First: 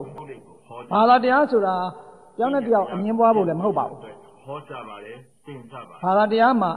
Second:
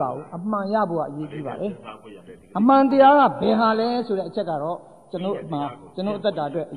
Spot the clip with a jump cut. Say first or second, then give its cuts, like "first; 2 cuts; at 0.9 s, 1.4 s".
first; 2 cuts; at 3.9 s, 5.5 s